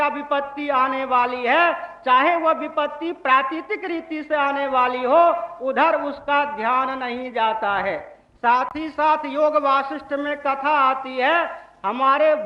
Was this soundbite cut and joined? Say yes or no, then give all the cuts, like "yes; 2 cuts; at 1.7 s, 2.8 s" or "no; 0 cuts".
no; 0 cuts